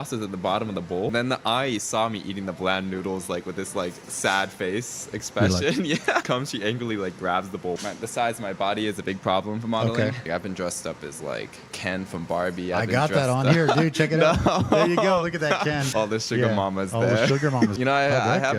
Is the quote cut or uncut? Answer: cut